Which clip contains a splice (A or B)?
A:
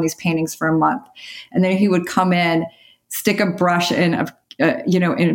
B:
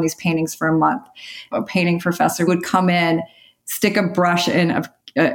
B